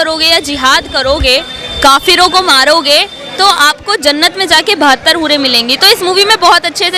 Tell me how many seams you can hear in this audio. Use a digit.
0